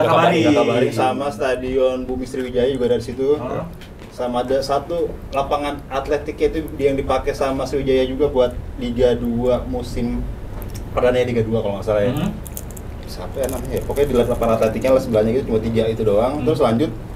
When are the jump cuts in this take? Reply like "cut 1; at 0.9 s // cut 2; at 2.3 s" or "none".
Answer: none